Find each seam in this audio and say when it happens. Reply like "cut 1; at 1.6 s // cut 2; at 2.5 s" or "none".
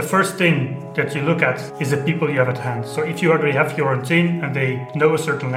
cut 1; at 1.7 s

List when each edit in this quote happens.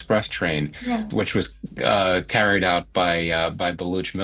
cut 1; at 1.1 s

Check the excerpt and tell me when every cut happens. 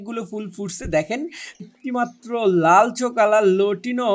cut 1; at 1.6 s

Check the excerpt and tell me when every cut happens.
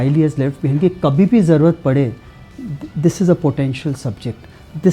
none

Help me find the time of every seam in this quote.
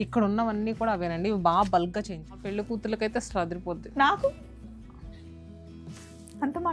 cut 1; at 2.5 s

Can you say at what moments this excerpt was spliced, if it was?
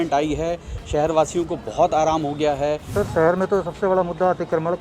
cut 1; at 2.8 s

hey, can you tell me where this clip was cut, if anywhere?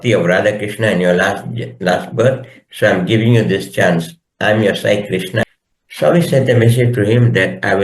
cut 1; at 5.4 s

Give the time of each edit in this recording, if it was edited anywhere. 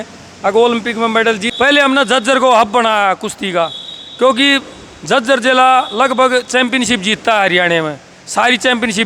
cut 1; at 1.5 s

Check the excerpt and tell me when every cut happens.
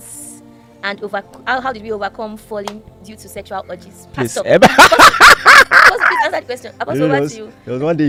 none

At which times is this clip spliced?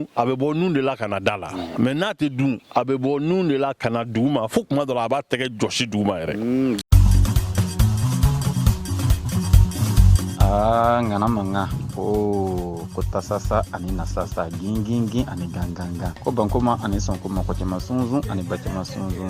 cut 1; at 6.8 s

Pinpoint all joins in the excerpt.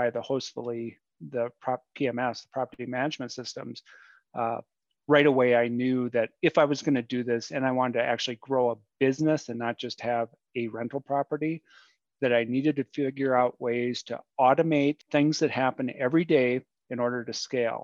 cut 1; at 15.0 s

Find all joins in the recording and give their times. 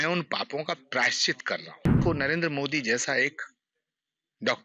cut 1; at 2.0 s

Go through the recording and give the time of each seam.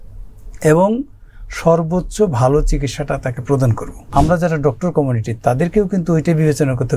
cut 1; at 4.0 s

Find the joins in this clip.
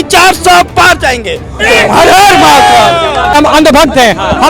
cut 1; at 1.6 s // cut 2; at 3.3 s

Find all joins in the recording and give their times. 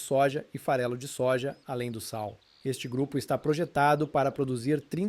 cut 1; at 2.5 s

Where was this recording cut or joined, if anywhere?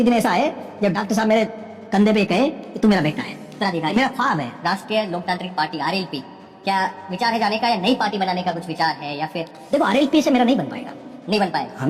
cut 1; at 4.5 s

